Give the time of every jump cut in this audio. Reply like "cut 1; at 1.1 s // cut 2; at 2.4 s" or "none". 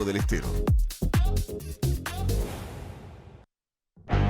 cut 1; at 3.4 s

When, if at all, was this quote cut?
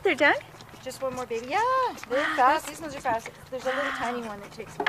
cut 1; at 3.6 s

